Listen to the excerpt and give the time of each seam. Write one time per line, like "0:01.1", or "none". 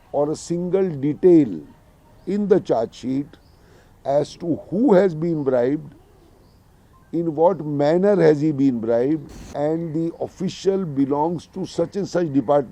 0:09.4